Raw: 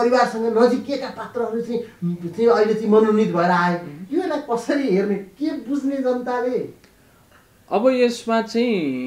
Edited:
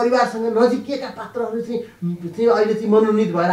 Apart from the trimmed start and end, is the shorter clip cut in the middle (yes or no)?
no